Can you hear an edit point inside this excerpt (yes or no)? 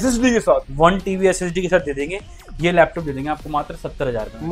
no